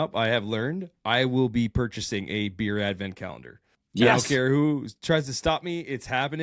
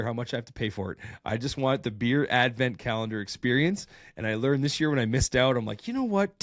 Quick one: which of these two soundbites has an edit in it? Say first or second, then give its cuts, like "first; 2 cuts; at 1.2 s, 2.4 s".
first; 1 cut; at 4.0 s